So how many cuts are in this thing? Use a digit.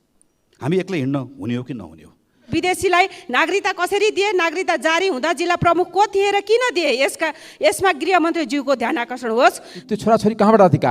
2